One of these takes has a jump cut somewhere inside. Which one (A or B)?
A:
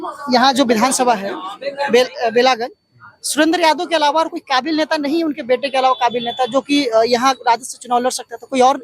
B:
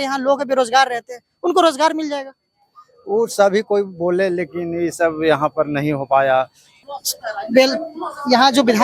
B